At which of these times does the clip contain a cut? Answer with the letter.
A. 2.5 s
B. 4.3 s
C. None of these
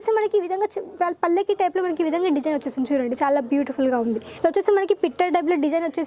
B